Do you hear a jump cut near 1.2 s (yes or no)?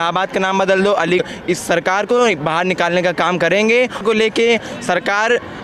yes